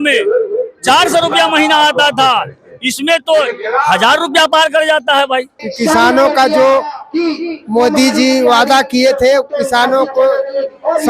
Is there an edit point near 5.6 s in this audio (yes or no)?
yes